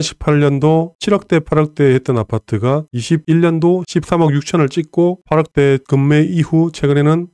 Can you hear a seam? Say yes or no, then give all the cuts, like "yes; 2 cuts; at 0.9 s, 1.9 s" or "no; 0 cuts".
no; 0 cuts